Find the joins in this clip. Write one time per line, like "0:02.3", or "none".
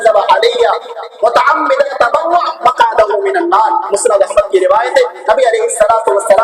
0:01.9